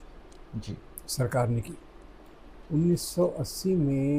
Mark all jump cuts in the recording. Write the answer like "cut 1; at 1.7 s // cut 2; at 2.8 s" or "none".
none